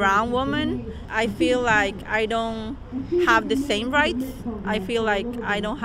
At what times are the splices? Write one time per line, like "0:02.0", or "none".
0:01.1